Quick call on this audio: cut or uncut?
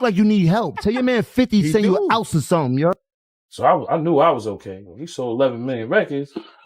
cut